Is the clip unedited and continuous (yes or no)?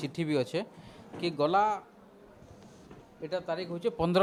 yes